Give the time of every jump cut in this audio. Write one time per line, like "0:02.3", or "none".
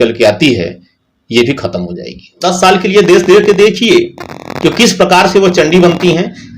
0:02.5